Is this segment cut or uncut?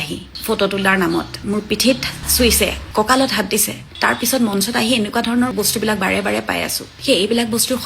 cut